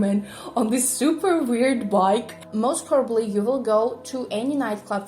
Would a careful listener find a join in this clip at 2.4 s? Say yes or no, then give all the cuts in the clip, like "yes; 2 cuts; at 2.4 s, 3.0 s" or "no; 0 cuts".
yes; 1 cut; at 2.4 s